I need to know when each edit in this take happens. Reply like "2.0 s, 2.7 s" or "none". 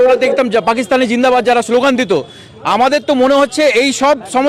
none